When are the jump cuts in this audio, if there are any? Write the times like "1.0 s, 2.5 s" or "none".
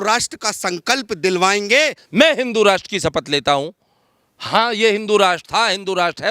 2.0 s